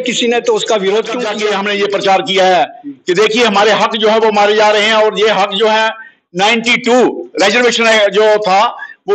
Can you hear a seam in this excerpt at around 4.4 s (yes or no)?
no